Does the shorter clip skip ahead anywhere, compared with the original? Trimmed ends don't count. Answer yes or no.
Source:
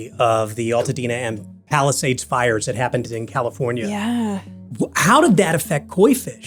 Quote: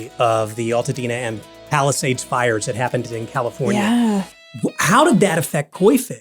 yes